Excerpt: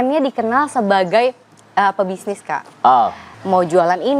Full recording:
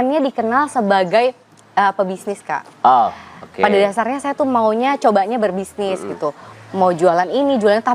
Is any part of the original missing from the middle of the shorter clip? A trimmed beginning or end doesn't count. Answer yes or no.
yes